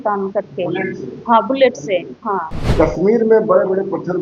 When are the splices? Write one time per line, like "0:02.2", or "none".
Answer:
0:02.6